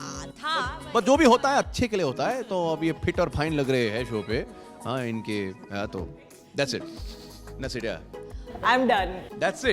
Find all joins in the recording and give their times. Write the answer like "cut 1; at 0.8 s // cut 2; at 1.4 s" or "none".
cut 1; at 6.4 s